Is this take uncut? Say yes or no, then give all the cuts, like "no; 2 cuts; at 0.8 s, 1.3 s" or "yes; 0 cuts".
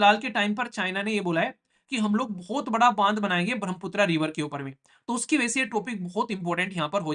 yes; 0 cuts